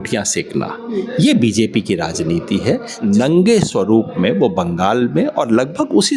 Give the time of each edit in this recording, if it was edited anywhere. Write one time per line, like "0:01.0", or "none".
0:02.9